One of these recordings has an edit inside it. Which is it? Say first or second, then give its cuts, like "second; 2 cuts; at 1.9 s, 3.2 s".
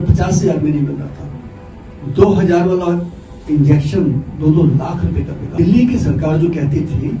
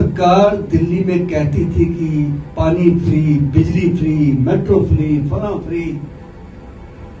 first; 1 cut; at 5.5 s